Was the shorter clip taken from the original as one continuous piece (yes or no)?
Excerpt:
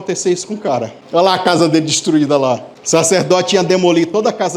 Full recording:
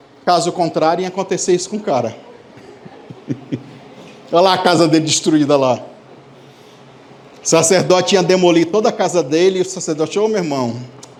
no